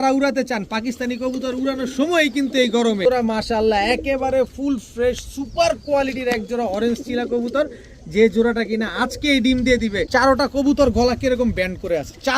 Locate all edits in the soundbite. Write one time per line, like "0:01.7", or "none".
0:03.1
0:10.0